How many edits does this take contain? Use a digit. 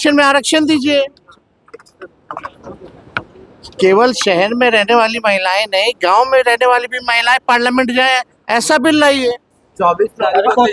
0